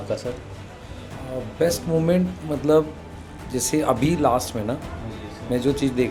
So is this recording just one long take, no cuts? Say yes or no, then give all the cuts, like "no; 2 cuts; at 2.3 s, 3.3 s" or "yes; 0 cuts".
yes; 0 cuts